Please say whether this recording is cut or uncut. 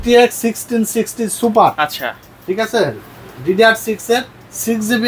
uncut